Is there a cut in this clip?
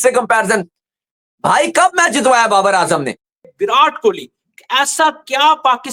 yes; 1 cut; at 3.5 s

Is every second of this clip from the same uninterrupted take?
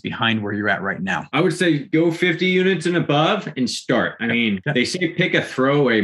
no; 3 cuts; at 1.3 s, 1.8 s, 4.4 s

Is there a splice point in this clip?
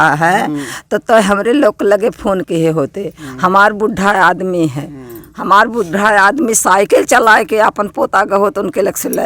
no; 0 cuts

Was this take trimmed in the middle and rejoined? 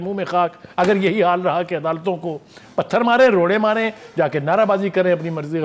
no; 0 cuts

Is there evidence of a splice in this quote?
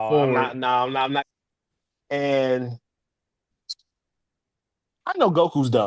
yes; 1 cut; at 1.2 s

